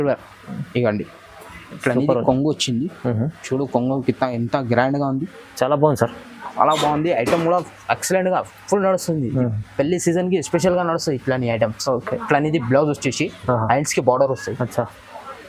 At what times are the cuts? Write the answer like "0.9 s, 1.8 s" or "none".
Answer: none